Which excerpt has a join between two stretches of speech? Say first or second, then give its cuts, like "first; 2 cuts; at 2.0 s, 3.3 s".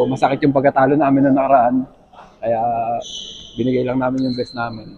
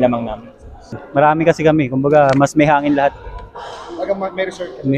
second; 1 cut; at 1.0 s